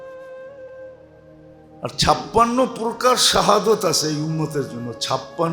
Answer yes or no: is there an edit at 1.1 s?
yes